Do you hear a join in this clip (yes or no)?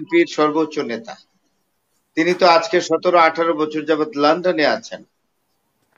no